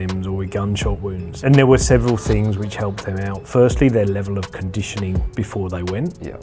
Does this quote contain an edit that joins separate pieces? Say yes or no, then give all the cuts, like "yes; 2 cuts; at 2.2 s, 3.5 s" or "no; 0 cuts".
yes; 1 cut; at 1.4 s